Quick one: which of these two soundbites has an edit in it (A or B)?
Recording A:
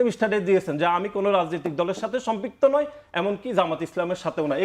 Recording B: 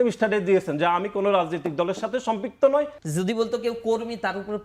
B